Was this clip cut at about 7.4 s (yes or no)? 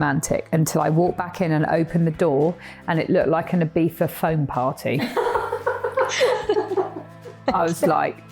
yes